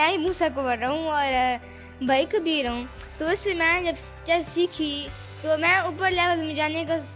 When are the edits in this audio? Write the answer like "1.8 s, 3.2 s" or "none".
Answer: none